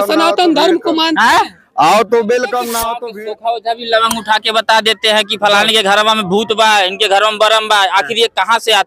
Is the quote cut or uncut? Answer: cut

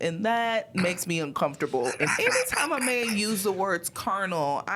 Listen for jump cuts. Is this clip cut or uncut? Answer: cut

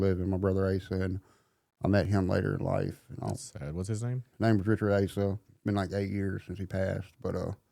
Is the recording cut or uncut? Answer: cut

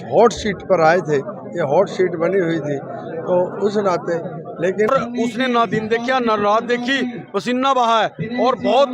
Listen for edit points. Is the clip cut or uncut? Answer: cut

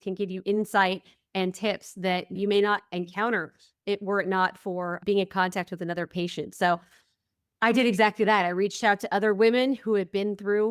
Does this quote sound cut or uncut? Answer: cut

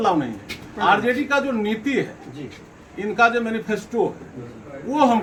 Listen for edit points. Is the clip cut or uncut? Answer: uncut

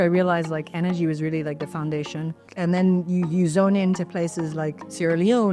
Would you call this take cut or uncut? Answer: cut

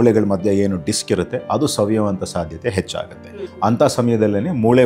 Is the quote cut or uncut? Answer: cut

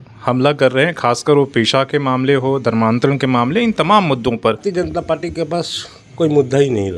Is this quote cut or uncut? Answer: cut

